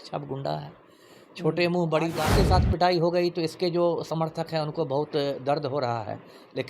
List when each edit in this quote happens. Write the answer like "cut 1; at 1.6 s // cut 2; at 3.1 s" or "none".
cut 1; at 2.3 s